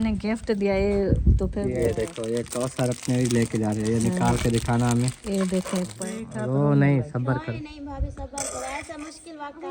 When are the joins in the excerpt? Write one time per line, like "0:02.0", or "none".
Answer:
0:01.6
0:05.9